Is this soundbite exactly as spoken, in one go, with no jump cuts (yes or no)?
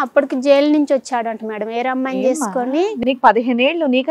yes